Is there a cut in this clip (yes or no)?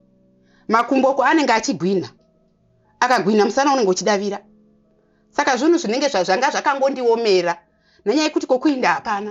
no